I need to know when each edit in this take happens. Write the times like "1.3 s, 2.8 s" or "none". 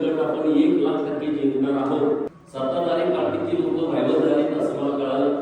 2.3 s